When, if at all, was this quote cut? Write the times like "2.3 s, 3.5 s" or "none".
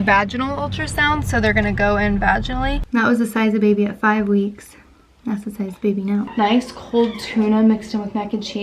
2.8 s, 6.3 s

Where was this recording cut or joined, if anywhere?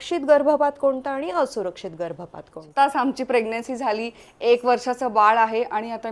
2.6 s

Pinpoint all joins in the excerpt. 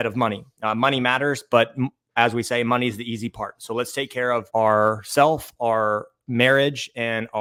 none

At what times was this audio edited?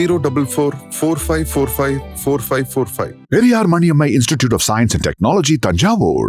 none

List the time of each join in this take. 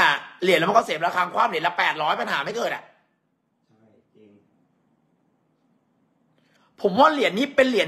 none

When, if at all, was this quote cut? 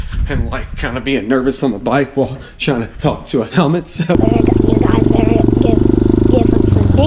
4.1 s

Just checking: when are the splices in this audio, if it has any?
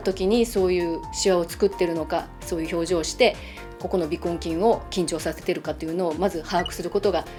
none

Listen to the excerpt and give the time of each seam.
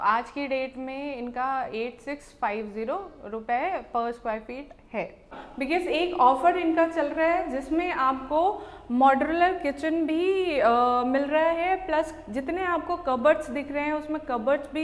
5.4 s

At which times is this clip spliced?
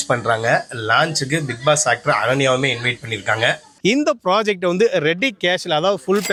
none

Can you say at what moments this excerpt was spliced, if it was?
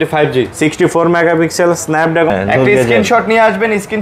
2.3 s

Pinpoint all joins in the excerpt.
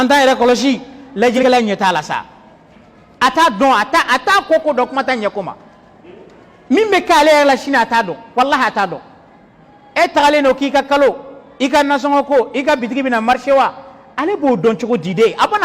1.4 s

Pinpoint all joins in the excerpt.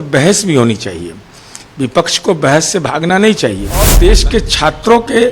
3.9 s

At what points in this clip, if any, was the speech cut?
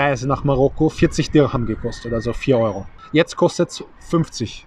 2.9 s

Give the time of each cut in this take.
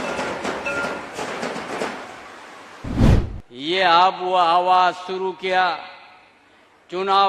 3.0 s

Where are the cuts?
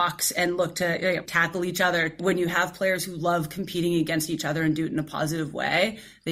1.3 s, 2.2 s

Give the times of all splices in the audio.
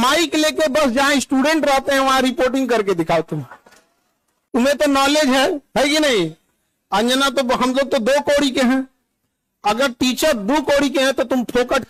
none

